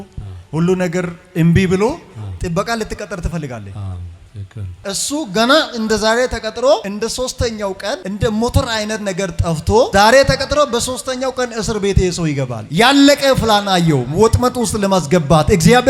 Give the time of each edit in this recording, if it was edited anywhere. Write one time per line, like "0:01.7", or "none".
0:04.8